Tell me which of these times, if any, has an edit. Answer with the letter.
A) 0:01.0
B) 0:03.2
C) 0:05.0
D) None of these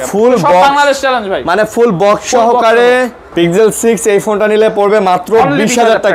B